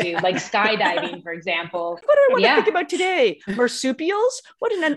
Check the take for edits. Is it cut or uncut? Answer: cut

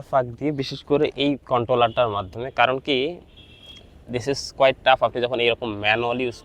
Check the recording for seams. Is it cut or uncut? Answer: uncut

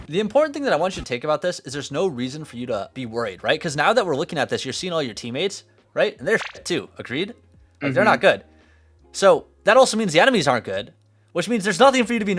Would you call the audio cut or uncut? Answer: cut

